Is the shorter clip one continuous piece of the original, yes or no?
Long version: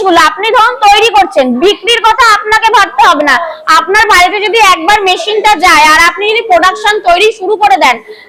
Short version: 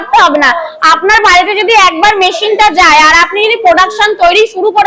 yes